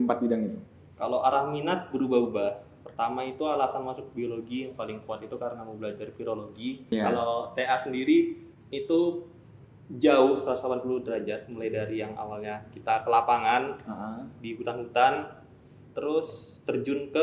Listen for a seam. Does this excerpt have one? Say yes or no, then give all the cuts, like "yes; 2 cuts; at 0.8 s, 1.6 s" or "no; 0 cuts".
yes; 1 cut; at 6.9 s